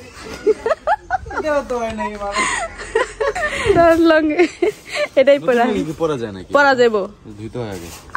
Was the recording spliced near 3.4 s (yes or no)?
yes